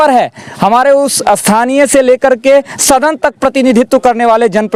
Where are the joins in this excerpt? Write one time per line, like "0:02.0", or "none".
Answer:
none